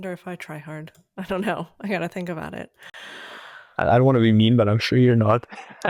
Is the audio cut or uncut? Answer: uncut